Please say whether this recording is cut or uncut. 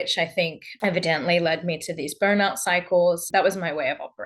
cut